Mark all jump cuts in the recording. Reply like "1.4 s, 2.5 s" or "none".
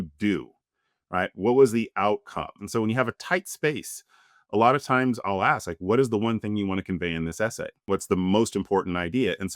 2.6 s, 7.8 s